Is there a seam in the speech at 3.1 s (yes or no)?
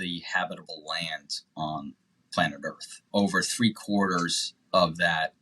yes